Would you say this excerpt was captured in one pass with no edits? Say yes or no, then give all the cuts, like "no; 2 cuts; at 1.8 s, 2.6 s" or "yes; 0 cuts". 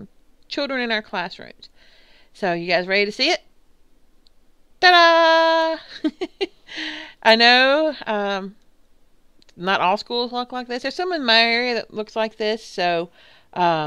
no; 1 cut; at 12.7 s